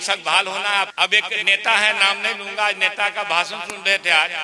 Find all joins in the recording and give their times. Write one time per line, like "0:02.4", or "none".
0:00.9